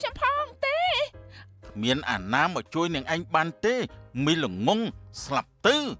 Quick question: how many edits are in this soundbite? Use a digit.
0